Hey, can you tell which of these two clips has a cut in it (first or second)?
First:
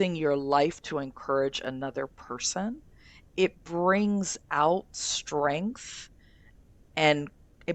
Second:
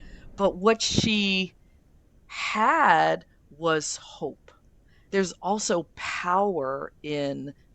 second